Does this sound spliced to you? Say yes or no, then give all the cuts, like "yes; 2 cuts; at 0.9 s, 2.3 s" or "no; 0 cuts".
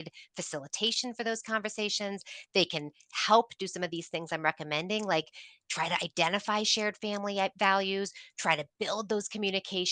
no; 0 cuts